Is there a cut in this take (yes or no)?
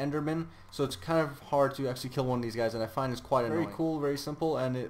yes